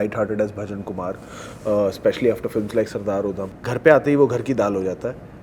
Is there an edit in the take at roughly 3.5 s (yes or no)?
yes